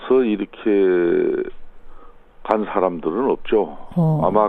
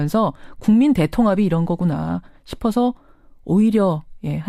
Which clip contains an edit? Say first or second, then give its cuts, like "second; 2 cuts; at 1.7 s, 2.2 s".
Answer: first; 1 cut; at 1.5 s